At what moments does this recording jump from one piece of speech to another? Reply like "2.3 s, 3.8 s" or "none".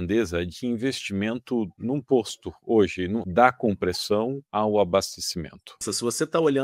1.8 s, 3.2 s, 4.4 s, 5.8 s